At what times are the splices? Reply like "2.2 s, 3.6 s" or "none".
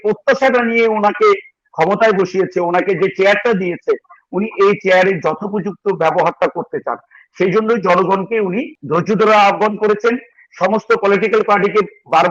8.7 s